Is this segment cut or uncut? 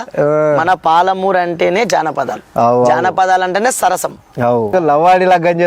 cut